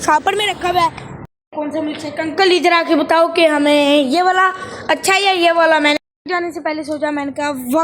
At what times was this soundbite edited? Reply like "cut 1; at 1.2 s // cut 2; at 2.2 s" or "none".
cut 1; at 1.1 s // cut 2; at 6.0 s

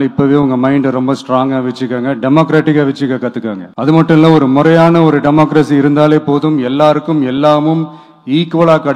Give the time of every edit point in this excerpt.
cut 1; at 3.6 s

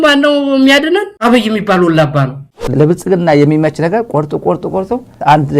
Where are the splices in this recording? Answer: cut 1; at 2.6 s

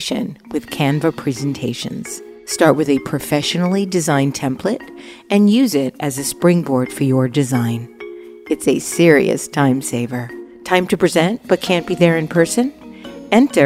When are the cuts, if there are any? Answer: none

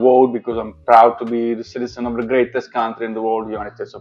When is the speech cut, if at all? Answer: none

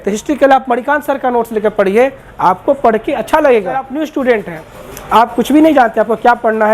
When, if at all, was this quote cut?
cut 1; at 3.9 s

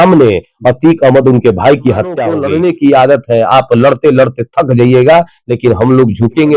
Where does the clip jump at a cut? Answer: cut 1; at 2.3 s

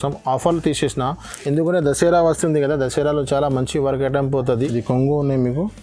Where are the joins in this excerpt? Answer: cut 1; at 4.5 s

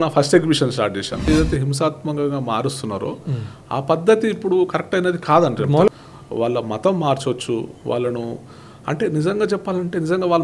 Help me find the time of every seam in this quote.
cut 1; at 1.3 s // cut 2; at 5.9 s

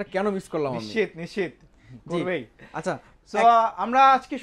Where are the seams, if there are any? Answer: none

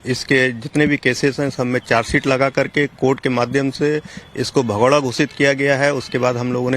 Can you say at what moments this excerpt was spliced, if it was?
cut 1; at 1.8 s

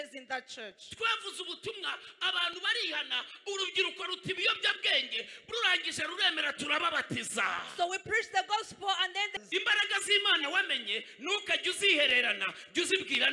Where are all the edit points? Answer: cut 1; at 9.3 s

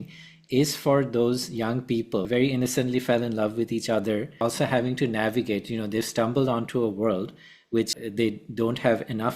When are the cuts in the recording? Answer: cut 1; at 2.3 s // cut 2; at 4.4 s // cut 3; at 7.9 s

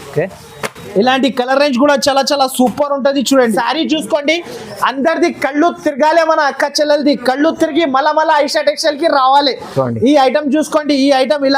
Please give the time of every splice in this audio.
cut 1; at 3.5 s

